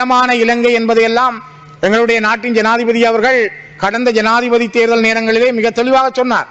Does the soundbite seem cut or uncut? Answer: uncut